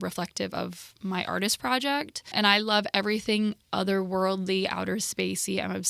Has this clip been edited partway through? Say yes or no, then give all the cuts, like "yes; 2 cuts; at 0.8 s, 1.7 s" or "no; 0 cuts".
yes; 1 cut; at 2.3 s